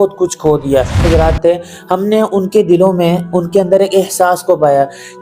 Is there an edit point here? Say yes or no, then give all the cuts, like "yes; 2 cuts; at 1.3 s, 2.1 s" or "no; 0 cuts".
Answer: yes; 1 cut; at 1.3 s